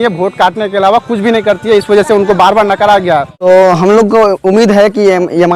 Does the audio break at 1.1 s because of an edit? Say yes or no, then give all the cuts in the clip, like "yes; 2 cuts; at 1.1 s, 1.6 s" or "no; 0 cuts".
no; 1 cut; at 3.4 s